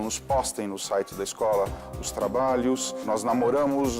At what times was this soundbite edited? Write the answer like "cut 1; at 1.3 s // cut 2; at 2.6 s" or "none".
cut 1; at 3.0 s